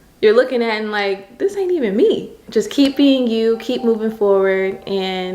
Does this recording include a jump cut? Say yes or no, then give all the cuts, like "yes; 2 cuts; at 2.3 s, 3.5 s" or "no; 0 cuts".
yes; 1 cut; at 2.4 s